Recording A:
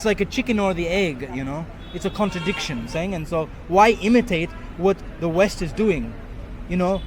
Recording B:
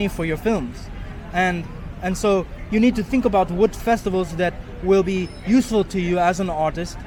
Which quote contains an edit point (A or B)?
A